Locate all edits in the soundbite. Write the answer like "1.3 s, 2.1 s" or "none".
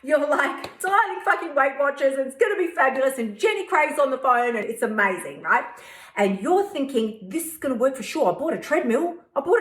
4.6 s